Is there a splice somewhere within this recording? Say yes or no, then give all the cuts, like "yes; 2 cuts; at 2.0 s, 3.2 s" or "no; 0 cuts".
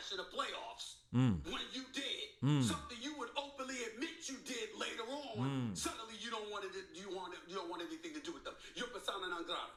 no; 0 cuts